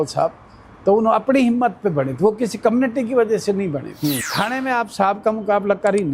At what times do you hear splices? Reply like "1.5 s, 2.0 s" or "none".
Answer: 4.2 s